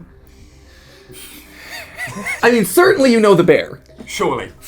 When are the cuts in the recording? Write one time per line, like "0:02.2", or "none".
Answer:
0:02.3